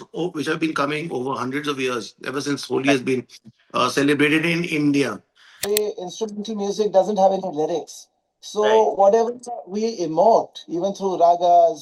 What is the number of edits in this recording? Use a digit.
1